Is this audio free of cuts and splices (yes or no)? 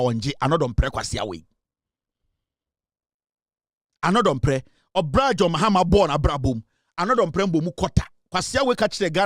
yes